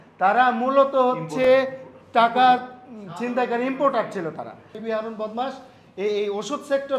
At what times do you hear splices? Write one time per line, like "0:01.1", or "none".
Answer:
0:04.7

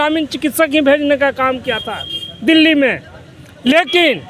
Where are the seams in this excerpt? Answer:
none

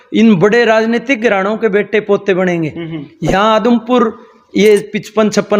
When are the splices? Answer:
none

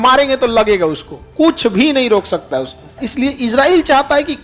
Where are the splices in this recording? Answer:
0:03.0

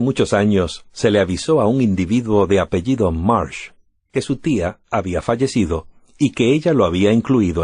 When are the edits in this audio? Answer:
none

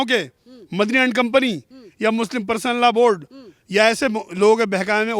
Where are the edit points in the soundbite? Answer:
none

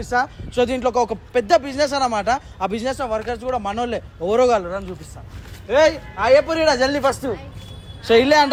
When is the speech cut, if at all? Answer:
none

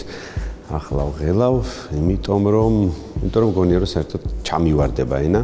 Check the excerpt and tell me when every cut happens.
none

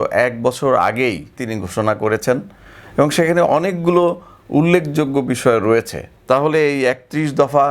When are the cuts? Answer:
0:01.4
0:06.1

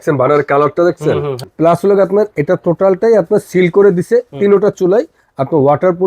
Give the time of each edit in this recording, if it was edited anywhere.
0:01.4

